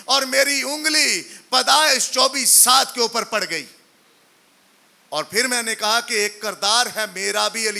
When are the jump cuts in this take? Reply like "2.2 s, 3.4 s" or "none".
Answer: none